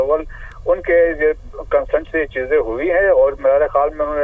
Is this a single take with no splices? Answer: yes; 0 cuts

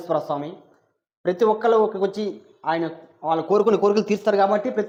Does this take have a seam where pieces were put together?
no; 0 cuts

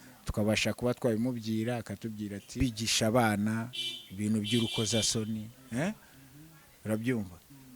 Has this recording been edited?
yes; 1 cut; at 2.6 s

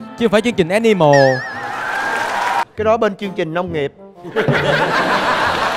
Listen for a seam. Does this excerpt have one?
yes; 1 cut; at 2.7 s

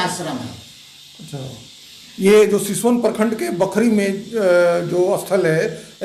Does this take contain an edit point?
no; 0 cuts

